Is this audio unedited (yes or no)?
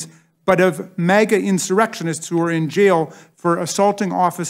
yes